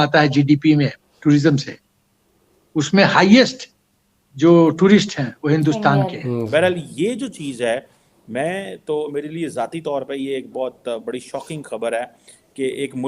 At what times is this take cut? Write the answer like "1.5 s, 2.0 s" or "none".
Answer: 6.5 s